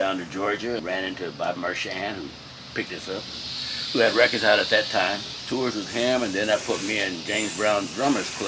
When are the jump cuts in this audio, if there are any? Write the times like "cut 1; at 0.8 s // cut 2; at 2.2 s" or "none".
cut 1; at 0.8 s // cut 2; at 5.4 s

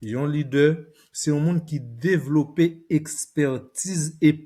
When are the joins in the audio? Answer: none

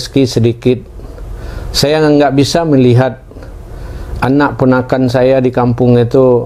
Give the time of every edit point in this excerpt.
none

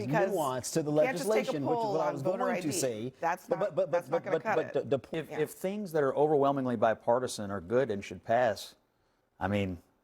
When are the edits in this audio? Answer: cut 1; at 5.1 s

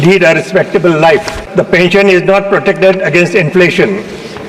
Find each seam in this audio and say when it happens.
cut 1; at 1.9 s

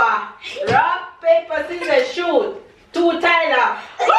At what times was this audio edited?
none

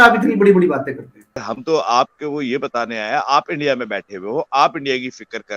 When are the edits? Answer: cut 1; at 1.5 s

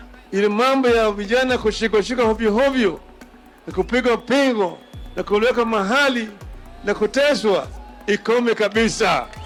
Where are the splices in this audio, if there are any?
none

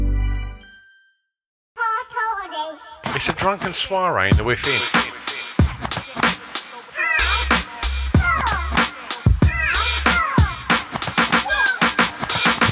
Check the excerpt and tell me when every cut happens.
cut 1; at 1.6 s

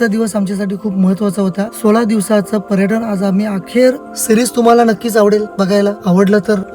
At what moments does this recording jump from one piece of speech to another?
cut 1; at 4.1 s // cut 2; at 6.0 s

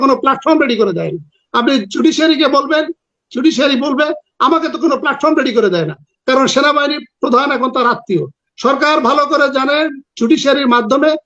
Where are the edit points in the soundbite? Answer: cut 1; at 6.1 s

